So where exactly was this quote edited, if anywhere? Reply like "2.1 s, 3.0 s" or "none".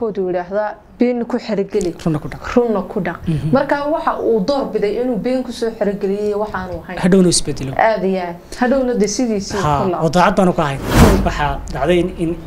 11.0 s